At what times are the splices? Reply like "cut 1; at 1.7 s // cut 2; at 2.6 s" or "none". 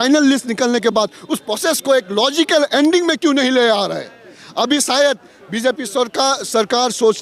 none